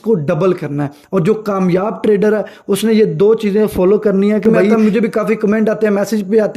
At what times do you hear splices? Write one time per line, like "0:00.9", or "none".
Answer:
0:04.7